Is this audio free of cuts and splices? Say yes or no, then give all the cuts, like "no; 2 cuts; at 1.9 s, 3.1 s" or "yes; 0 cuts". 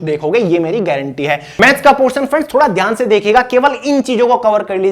no; 1 cut; at 1.5 s